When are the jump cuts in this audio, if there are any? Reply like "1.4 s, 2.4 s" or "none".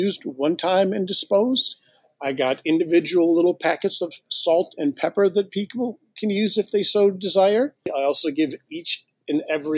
7.9 s